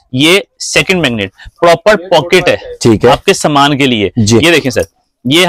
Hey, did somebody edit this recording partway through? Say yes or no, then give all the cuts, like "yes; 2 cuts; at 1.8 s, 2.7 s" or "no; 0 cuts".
no; 0 cuts